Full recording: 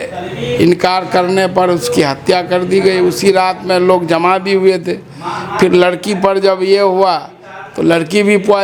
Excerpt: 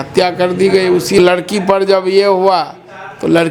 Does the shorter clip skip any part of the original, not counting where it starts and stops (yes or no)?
yes